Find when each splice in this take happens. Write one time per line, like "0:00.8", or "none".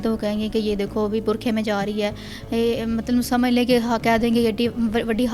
none